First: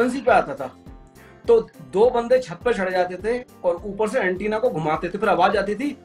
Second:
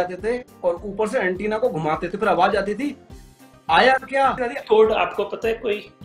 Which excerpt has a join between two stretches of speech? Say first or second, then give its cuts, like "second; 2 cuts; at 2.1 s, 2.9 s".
second; 1 cut; at 4.5 s